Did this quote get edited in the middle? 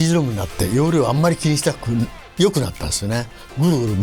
no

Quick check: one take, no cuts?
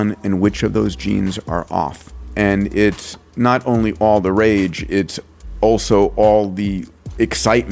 no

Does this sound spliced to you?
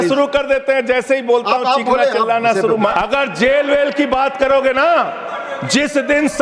yes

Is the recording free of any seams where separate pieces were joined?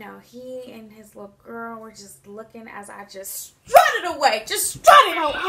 yes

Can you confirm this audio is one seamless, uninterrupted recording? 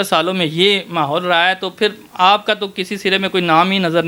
yes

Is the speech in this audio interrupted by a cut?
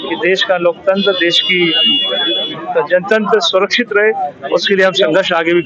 no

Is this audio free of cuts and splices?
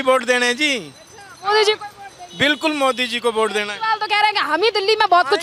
yes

